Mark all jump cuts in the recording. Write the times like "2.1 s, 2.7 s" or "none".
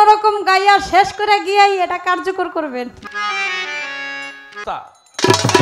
3.0 s, 4.6 s